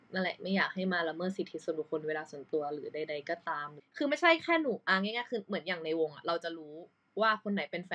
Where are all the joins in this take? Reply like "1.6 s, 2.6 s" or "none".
3.8 s